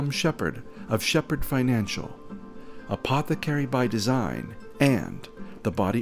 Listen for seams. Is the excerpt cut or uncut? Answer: uncut